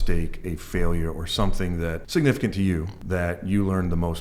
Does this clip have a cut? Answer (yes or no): yes